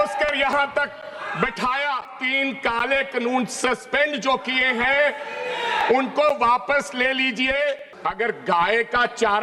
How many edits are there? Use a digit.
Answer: 2